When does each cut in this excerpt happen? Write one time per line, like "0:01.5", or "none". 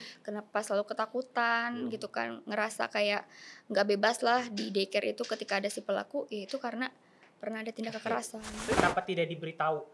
0:08.8

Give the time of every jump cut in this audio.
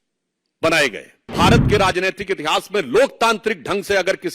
0:01.3

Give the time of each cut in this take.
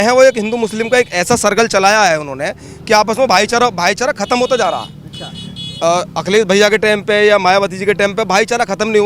none

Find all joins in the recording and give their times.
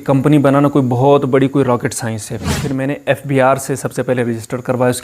0:02.6

